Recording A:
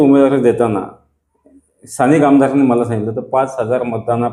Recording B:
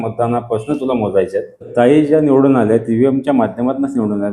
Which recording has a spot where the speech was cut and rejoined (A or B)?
B